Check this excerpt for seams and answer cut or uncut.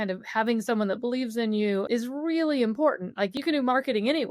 cut